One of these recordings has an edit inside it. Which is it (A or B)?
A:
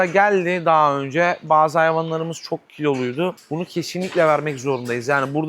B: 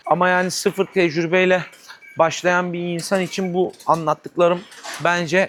A